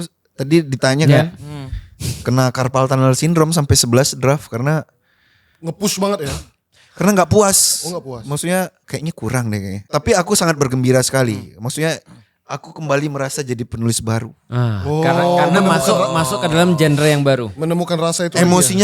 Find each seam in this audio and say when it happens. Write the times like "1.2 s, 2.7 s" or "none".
8.9 s, 9.8 s